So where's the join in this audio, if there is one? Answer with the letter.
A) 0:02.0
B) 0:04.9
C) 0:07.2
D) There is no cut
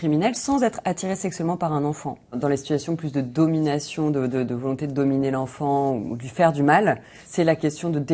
C